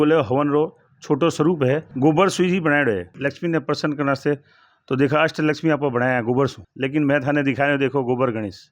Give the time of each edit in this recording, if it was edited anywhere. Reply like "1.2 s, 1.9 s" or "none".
1.9 s, 3.1 s, 6.6 s

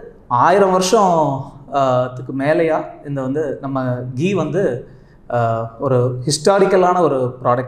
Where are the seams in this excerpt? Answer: none

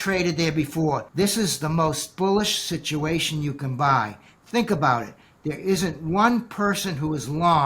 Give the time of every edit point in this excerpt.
1.1 s

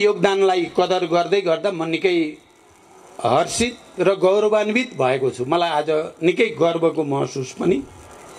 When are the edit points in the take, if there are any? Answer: none

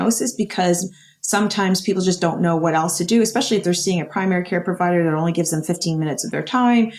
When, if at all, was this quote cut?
none

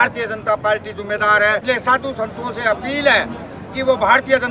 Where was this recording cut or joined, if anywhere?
1.6 s

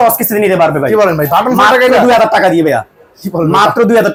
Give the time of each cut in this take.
none

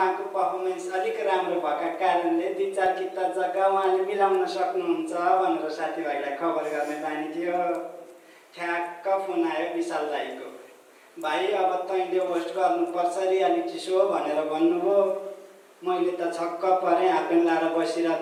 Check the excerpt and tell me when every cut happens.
none

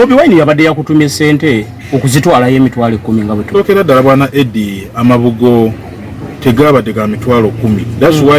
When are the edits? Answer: 3.6 s

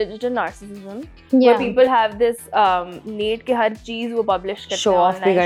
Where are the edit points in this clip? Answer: none

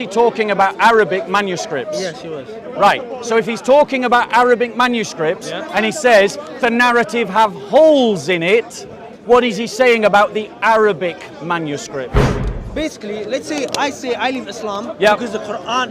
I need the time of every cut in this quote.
12.2 s

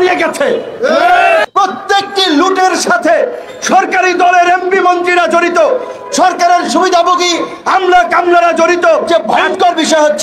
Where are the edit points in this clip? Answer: 1.5 s, 9.0 s

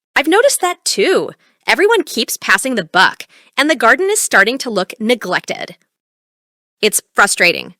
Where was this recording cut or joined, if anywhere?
1.7 s

